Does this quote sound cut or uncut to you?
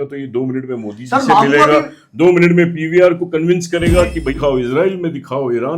cut